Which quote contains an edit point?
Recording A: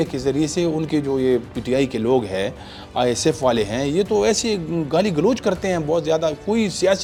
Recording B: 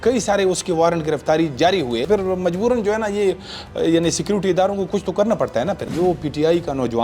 B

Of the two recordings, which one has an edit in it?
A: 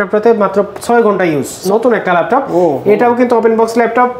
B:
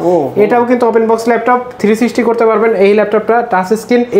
A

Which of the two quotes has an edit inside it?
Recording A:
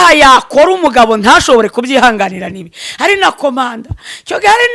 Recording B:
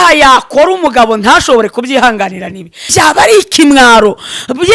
B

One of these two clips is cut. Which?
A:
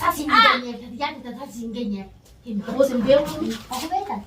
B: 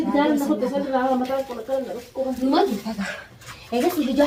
A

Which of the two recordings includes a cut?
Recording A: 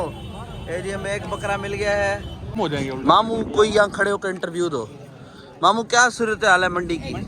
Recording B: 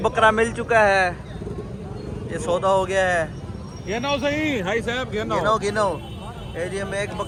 A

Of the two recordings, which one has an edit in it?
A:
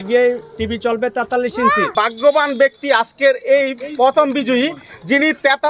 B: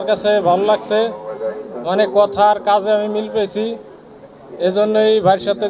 A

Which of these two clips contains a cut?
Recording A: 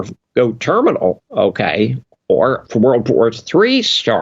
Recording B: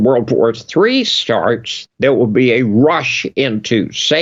A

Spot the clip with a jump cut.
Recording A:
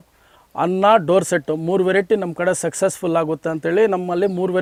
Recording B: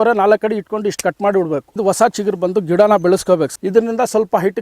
B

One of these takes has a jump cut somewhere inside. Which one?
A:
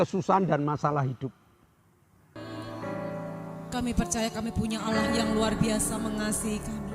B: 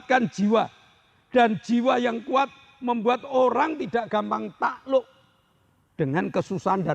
A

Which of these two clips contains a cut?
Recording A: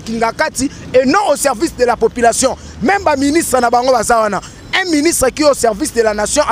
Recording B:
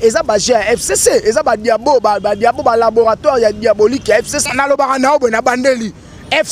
B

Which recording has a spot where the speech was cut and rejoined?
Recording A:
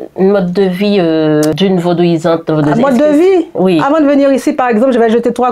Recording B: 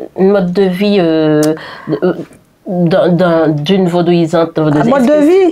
A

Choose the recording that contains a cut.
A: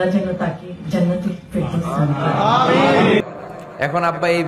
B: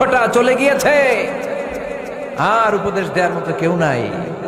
A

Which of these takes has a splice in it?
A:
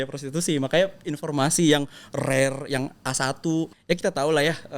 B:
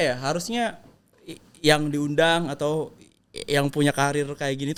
A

